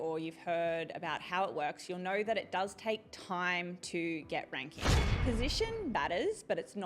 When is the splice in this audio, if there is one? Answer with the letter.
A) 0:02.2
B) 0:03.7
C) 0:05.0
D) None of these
C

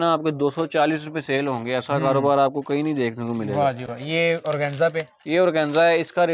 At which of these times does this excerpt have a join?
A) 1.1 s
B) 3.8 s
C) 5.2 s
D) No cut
D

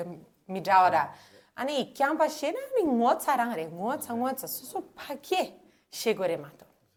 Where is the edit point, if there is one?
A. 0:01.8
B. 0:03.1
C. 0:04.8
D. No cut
D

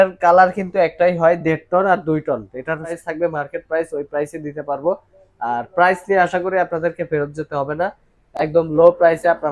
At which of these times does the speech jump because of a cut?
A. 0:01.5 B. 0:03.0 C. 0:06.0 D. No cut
B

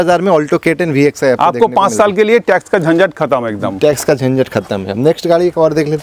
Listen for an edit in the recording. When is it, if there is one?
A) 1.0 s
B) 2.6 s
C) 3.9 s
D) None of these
D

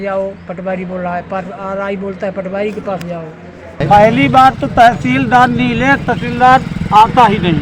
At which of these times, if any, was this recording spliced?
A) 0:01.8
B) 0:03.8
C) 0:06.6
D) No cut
B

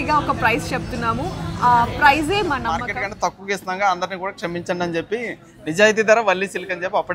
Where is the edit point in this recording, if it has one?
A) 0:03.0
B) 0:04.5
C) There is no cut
A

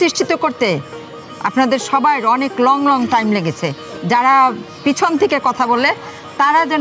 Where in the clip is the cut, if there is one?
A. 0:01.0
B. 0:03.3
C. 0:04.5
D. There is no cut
D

